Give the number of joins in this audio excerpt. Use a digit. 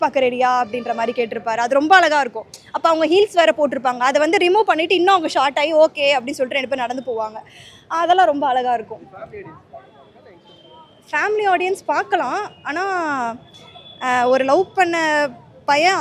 0